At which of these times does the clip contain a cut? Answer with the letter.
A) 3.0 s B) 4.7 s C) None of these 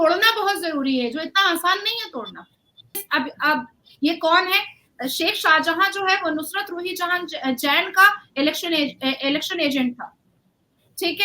A